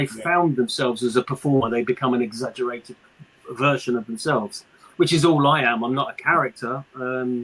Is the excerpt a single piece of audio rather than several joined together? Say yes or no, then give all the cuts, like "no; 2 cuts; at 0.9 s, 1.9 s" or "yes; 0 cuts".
yes; 0 cuts